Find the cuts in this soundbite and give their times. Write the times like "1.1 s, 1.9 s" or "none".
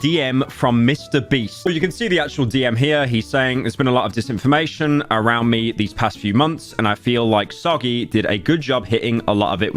1.7 s